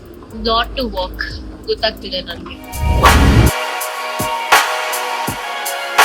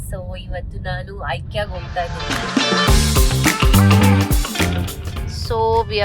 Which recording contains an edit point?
second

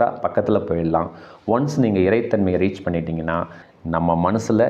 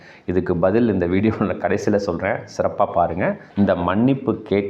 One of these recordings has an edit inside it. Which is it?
second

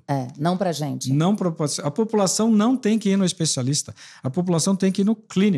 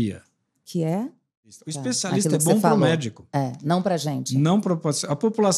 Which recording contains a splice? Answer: second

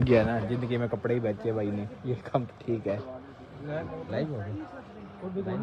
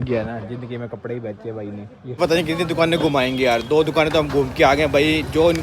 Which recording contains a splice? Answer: second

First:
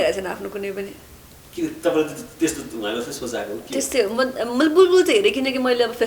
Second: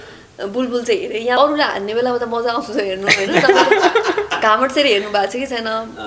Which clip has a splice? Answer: second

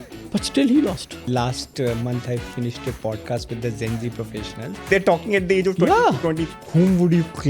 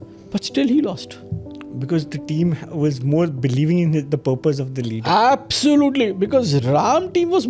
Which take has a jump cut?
first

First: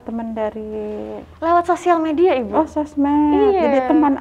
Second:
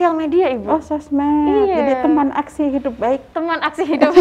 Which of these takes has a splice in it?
second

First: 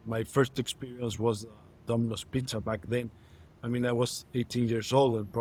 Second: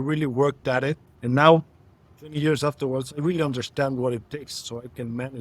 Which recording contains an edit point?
second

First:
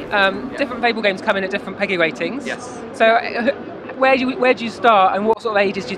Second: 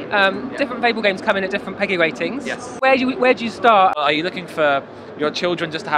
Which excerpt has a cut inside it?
second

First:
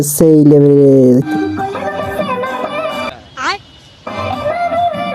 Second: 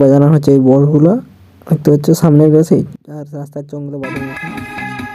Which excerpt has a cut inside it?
first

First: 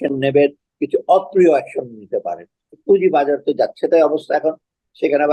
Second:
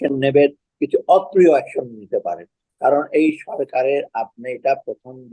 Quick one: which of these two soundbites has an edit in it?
first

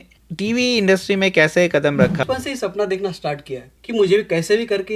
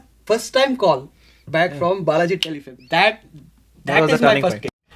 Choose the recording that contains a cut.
first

